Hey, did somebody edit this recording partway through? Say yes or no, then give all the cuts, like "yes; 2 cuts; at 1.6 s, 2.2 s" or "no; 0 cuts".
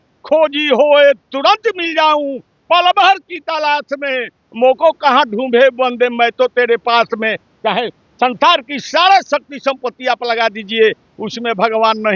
no; 0 cuts